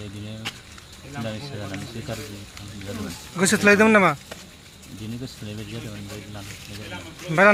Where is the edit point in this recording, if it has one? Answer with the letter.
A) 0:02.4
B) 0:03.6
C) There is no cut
C